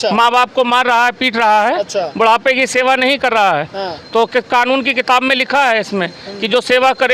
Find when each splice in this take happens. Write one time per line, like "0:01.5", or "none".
none